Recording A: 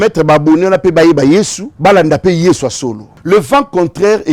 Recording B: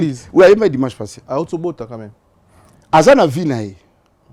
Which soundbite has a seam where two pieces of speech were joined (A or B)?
A